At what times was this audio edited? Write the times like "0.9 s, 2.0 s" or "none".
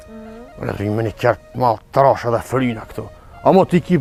none